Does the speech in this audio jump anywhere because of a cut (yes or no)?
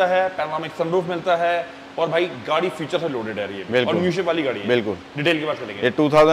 no